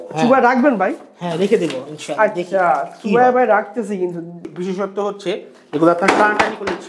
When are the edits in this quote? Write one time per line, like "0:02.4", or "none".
0:04.4

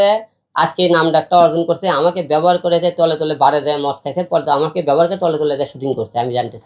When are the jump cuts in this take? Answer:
none

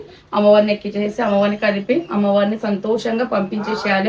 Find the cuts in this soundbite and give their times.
none

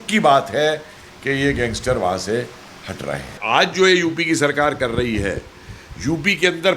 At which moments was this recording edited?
0:03.4

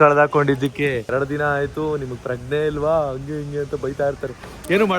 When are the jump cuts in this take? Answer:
0:01.1

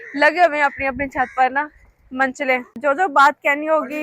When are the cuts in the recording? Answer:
0:02.7

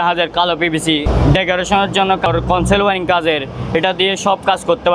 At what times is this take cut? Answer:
0:01.1
0:02.3

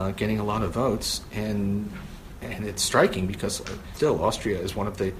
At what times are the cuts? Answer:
0:03.8

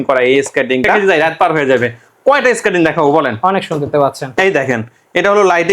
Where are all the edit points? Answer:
0:01.0

